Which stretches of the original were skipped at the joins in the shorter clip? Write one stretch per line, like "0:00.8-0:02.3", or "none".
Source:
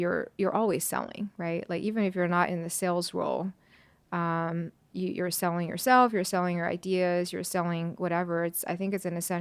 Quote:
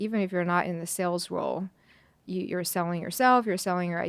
0:03.9-0:04.8